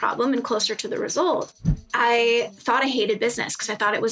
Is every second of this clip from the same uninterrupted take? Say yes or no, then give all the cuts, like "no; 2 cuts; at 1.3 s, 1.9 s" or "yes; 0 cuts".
no; 1 cut; at 1.5 s